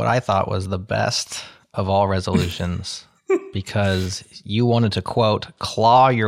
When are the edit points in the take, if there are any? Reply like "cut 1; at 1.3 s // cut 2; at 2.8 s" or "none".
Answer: none